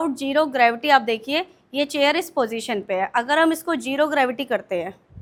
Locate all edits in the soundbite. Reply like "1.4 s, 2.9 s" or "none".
none